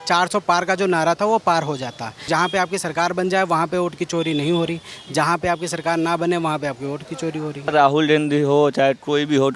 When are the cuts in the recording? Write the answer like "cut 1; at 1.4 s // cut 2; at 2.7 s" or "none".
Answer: cut 1; at 2.2 s // cut 2; at 7.7 s